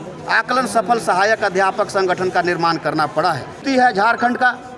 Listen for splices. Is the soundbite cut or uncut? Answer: cut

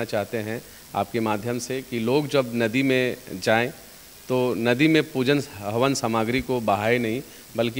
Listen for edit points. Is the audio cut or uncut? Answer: uncut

